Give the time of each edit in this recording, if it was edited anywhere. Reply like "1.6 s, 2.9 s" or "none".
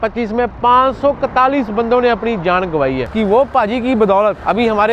3.1 s